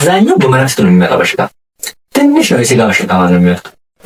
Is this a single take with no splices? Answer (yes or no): yes